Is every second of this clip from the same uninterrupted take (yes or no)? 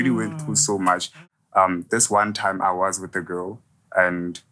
no